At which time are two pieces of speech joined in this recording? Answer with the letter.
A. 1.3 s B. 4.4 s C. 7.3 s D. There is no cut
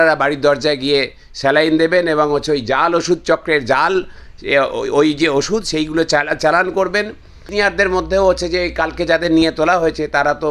C